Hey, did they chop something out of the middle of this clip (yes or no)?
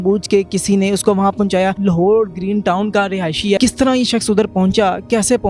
yes